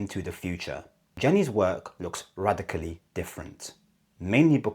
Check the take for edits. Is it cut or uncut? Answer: cut